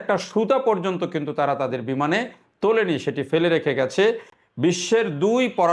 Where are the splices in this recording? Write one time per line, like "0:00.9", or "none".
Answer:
0:04.3

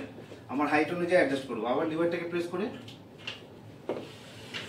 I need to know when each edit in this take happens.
0:03.6

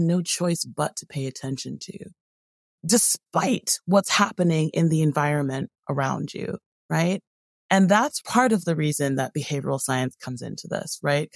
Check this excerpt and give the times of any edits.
0:02.8
0:08.2

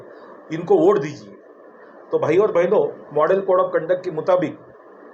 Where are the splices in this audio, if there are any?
none

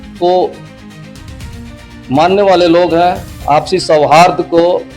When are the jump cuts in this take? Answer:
0:03.3

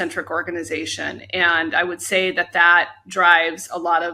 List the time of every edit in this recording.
none

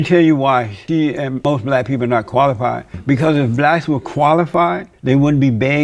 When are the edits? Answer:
0:01.1
0:02.9
0:04.9

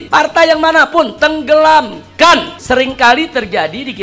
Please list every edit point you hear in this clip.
0:02.5

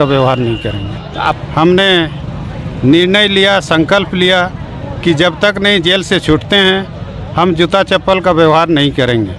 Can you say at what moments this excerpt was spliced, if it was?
0:01.4

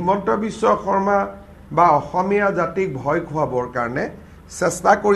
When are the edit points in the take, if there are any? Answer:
none

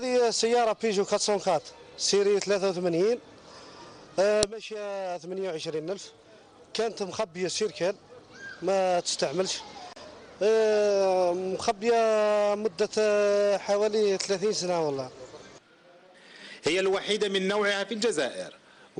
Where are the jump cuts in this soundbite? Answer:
none

